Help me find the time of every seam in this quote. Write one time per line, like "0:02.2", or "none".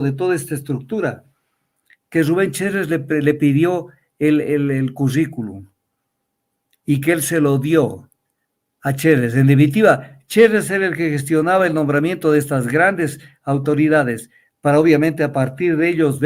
none